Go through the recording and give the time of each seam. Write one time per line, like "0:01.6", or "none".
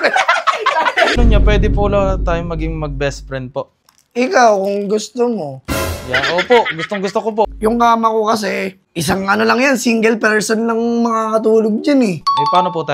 0:01.2
0:03.8
0:07.5